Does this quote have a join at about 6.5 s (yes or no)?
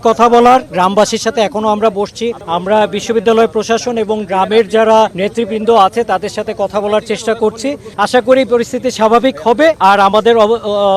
no